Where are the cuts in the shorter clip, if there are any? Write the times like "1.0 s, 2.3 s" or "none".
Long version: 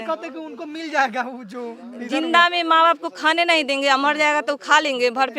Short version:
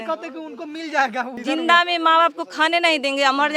1.3 s